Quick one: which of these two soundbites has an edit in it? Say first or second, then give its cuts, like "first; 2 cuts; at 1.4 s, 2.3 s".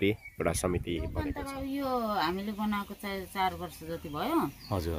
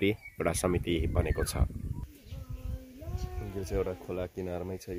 first; 1 cut; at 1.2 s